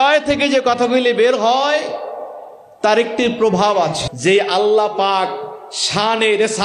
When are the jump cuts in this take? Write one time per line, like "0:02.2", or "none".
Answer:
0:04.0